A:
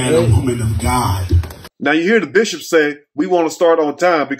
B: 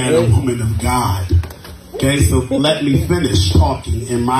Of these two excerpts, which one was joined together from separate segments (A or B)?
B